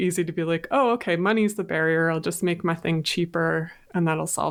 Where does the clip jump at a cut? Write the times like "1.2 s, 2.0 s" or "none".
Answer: none